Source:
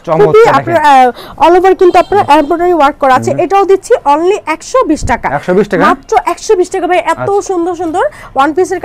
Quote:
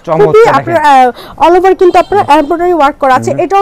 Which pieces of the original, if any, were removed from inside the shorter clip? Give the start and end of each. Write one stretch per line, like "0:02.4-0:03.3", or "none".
none